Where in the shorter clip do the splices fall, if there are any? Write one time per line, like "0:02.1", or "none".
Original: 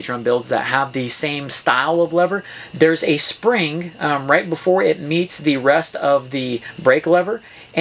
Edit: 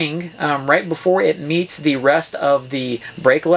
none